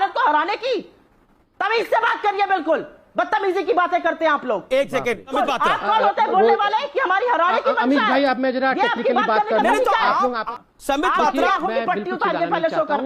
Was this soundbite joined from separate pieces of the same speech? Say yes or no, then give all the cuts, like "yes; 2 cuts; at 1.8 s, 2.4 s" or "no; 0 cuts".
yes; 2 cuts; at 5.3 s, 10.4 s